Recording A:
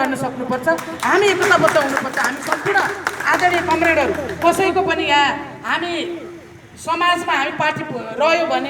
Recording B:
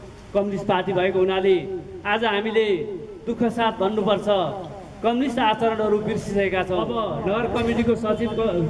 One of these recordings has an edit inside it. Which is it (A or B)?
B